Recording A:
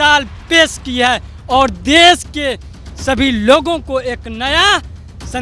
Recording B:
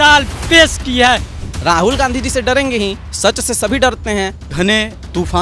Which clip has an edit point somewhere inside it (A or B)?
B